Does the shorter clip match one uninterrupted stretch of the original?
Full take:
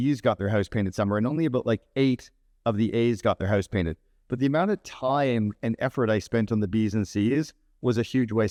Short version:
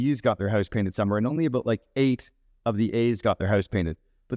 yes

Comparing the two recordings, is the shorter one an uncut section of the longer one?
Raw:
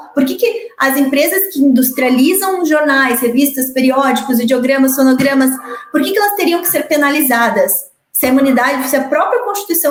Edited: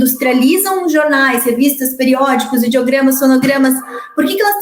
yes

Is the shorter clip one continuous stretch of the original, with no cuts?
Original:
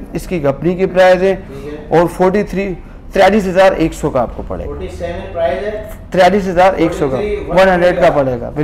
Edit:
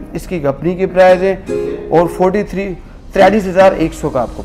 yes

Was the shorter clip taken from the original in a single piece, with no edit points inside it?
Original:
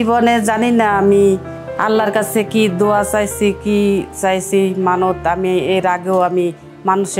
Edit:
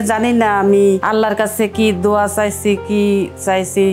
no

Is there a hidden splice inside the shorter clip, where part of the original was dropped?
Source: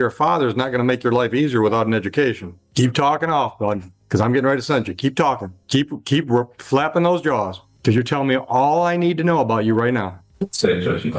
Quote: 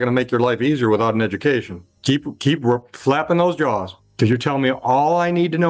yes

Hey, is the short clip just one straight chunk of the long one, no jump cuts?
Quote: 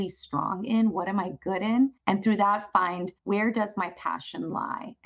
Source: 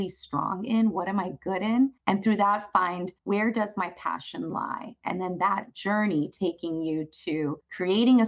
yes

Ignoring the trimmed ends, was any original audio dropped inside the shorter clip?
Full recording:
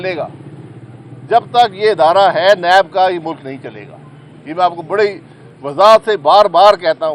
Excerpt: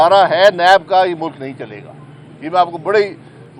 no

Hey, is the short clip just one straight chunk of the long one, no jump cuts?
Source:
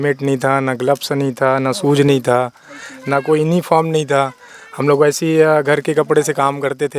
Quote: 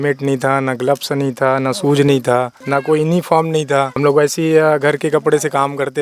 no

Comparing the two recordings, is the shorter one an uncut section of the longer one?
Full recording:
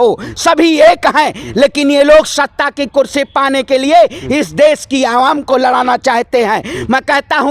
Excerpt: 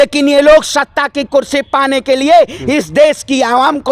yes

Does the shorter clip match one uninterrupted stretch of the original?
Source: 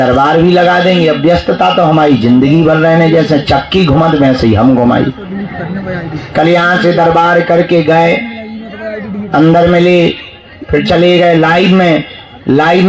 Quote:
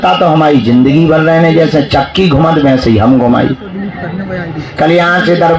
yes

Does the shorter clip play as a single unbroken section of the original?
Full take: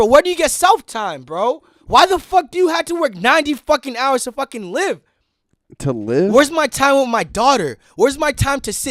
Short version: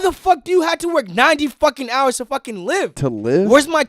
no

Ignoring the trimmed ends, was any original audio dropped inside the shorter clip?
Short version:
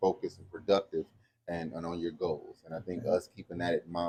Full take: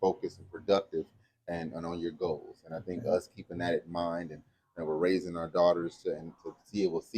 no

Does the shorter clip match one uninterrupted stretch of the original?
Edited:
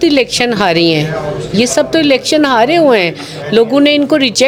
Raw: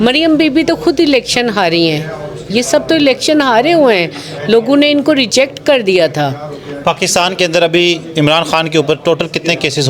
yes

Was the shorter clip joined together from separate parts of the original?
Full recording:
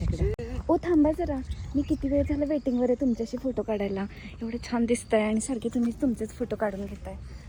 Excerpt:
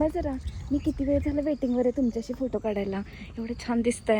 no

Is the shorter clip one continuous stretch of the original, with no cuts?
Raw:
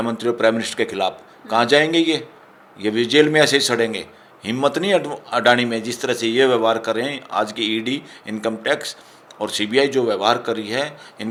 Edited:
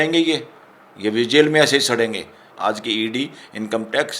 no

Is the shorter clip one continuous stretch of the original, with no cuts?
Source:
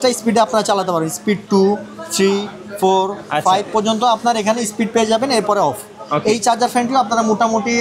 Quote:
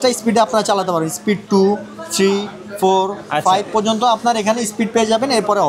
yes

